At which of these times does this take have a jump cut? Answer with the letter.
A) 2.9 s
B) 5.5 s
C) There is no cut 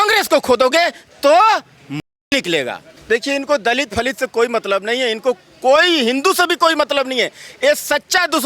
A